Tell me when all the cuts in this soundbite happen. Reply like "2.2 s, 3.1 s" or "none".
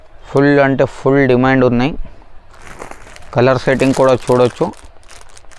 none